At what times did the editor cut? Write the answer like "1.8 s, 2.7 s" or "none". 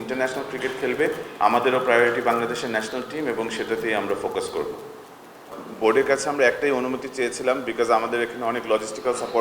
5.4 s